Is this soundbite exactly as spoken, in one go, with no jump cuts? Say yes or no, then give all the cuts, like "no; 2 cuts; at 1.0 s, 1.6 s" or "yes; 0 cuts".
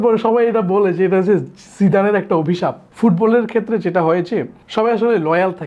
no; 2 cuts; at 2.8 s, 4.6 s